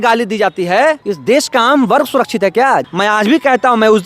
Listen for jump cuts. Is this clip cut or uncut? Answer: cut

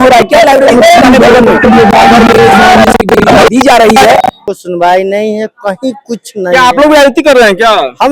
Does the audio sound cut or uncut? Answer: cut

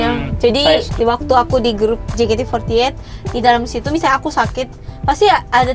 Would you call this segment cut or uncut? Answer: cut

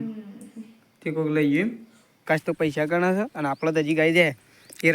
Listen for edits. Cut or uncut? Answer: cut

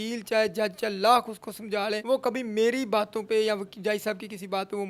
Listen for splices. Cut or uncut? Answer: cut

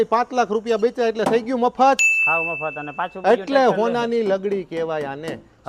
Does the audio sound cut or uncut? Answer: uncut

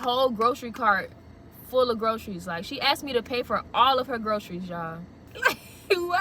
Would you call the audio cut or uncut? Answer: cut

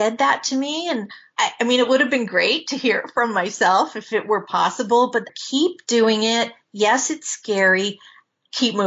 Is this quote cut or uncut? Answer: cut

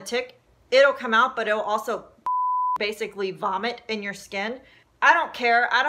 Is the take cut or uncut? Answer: cut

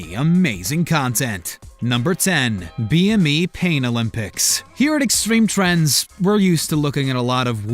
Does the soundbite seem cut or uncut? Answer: cut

